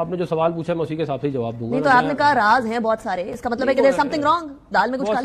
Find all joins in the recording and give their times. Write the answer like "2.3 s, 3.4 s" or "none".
none